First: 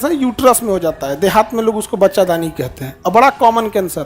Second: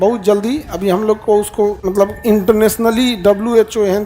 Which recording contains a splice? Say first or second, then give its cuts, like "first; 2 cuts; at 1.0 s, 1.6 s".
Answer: second; 1 cut; at 1.8 s